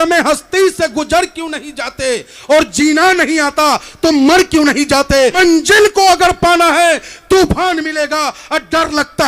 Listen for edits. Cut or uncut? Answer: cut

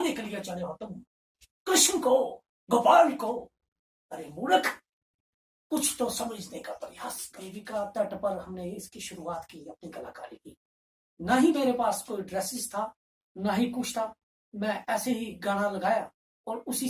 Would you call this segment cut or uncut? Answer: cut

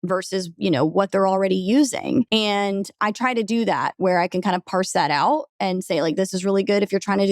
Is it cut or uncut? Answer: cut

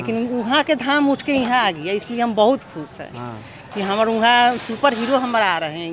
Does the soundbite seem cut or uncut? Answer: uncut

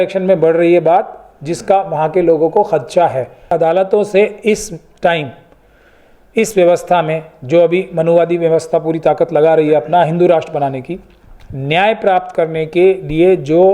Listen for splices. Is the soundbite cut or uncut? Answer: cut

